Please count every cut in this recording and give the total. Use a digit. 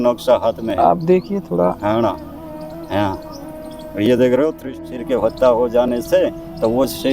1